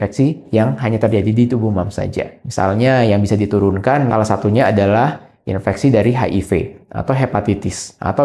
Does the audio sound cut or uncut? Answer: uncut